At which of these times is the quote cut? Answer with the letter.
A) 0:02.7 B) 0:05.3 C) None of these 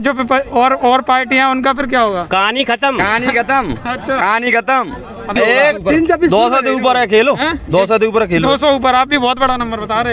B